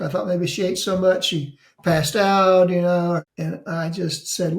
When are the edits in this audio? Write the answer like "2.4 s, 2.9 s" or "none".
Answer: 3.3 s